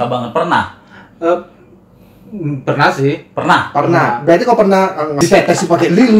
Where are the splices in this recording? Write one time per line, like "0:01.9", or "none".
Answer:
0:05.1

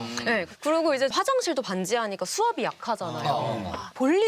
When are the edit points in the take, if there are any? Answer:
0:01.1

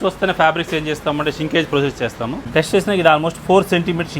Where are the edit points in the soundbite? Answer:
0:02.4

